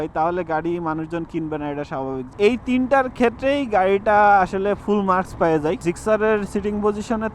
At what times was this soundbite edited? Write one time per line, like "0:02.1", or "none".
0:02.3
0:05.8

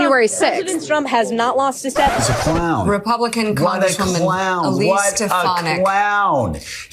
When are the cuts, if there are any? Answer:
0:02.2

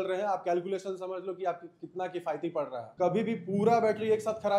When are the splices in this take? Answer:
0:02.8

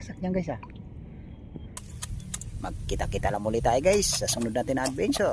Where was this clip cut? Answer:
0:01.8

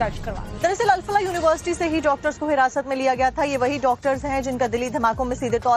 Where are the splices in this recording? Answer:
0:01.3

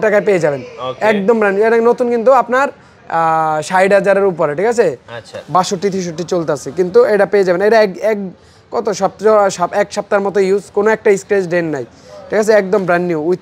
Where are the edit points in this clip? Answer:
none

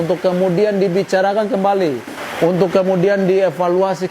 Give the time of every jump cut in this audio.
none

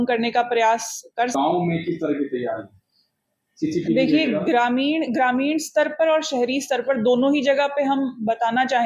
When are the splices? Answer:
0:01.3

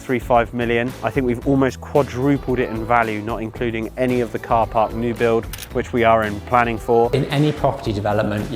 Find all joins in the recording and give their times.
0:01.0
0:07.1

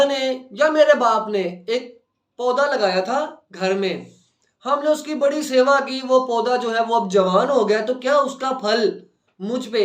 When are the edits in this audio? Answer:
none

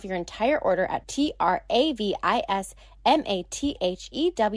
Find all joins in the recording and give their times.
none

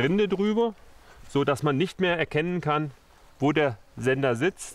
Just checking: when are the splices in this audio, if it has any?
none

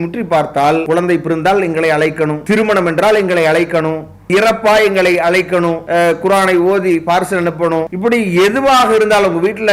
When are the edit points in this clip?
0:00.8
0:02.4
0:04.3
0:05.8
0:07.9

